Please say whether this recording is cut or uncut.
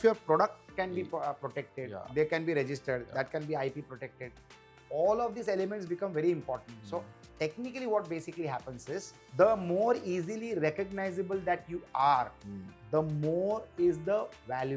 cut